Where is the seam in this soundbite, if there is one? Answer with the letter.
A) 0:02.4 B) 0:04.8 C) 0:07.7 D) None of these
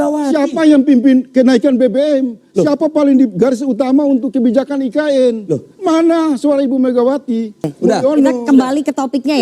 C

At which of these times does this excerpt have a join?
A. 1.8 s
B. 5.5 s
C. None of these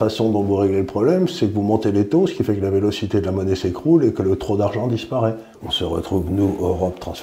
B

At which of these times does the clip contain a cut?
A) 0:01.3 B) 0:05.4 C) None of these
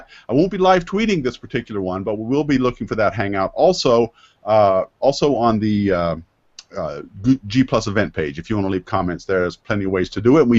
A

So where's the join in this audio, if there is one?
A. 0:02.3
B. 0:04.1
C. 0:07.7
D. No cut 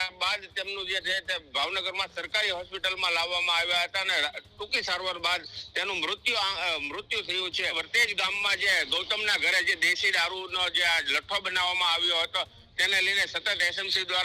C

